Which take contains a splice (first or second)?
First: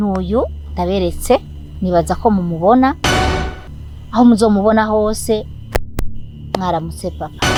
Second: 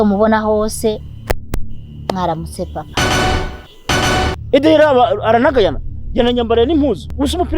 second